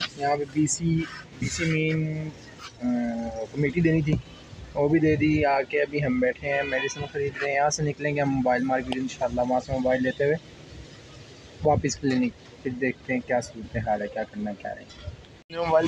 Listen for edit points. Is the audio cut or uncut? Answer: uncut